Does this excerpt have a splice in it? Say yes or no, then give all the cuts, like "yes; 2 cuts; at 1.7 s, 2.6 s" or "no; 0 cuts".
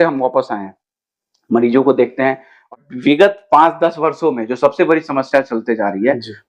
yes; 1 cut; at 2.7 s